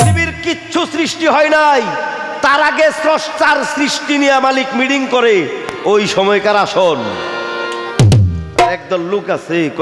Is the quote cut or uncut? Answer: uncut